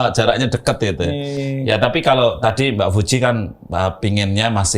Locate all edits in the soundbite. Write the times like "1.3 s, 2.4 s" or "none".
none